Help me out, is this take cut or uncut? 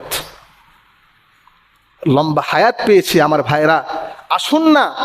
uncut